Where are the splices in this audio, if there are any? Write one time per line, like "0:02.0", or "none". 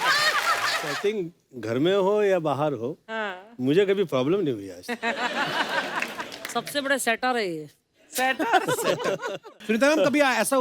0:01.0
0:09.5